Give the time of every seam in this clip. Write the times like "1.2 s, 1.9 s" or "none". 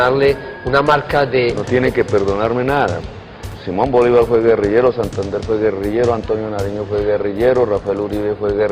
3.5 s